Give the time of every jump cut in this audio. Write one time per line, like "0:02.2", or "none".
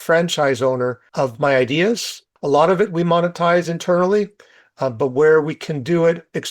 0:01.0
0:02.3